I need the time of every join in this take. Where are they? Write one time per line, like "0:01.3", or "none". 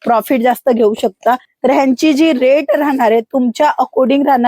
0:01.5